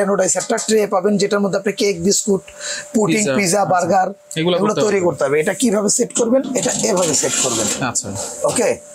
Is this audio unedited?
yes; 0 cuts

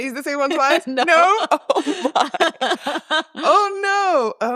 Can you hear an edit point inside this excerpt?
no; 0 cuts

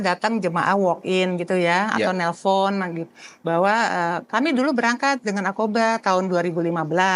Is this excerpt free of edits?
yes; 0 cuts

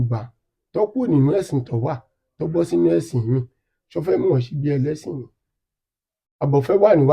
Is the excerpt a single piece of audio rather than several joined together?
yes; 0 cuts

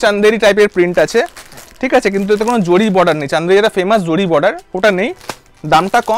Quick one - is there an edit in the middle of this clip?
no; 0 cuts

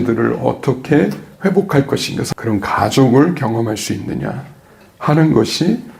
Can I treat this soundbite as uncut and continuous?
no; 1 cut; at 2.2 s

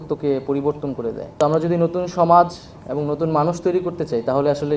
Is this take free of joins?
no; 1 cut; at 1.4 s

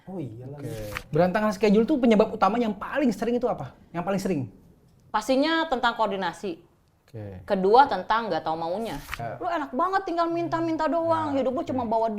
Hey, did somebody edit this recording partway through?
yes; 2 cuts; at 1.0 s, 9.2 s

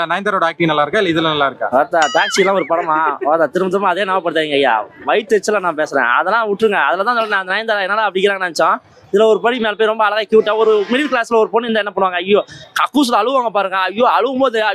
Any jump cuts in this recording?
no; 0 cuts

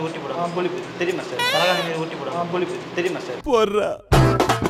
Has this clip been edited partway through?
no; 0 cuts

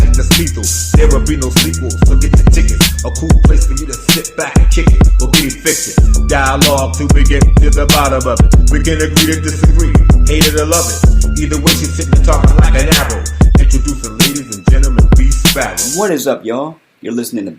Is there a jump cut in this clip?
yes; 1 cut; at 15.9 s

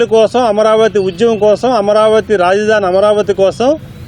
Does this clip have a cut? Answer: no; 0 cuts

